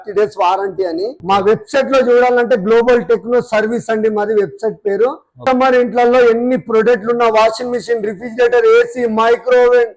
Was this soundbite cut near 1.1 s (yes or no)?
yes